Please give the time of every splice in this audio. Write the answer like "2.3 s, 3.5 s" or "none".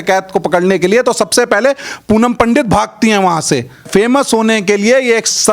3.8 s